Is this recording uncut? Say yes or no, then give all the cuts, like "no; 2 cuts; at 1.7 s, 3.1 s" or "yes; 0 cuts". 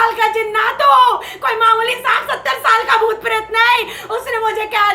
yes; 0 cuts